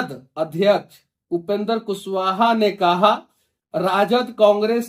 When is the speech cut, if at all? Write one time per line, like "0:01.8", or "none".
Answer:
none

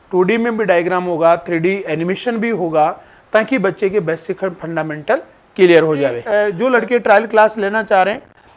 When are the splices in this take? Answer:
0:06.2

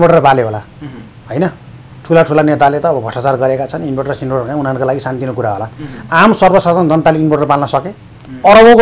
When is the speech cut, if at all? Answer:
none

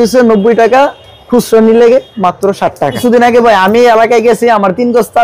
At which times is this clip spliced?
0:03.0

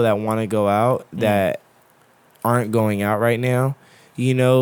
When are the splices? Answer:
none

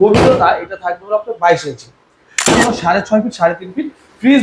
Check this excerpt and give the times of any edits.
0:02.5

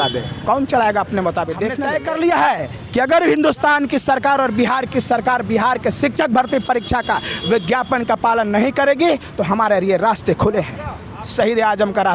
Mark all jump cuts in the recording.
0:01.8

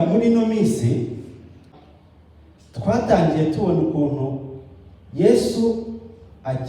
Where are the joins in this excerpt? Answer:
0:01.8

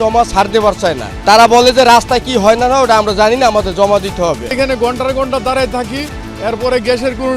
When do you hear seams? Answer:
0:01.1
0:04.5

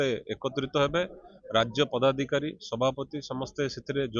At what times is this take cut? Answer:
none

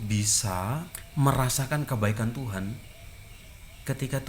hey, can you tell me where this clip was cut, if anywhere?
0:01.0

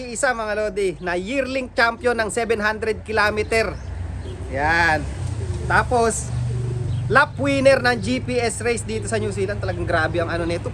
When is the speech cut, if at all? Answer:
none

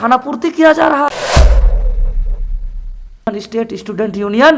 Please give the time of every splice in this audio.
0:00.9
0:03.3

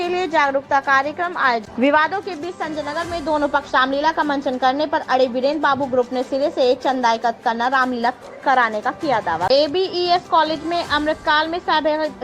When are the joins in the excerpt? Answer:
0:01.7
0:09.5

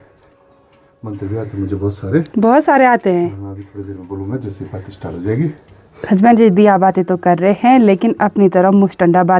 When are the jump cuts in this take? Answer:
none

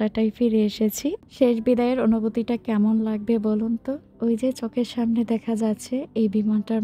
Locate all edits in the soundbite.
0:01.3

